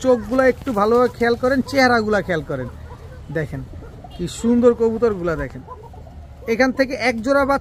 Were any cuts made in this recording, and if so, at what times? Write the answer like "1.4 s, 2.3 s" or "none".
none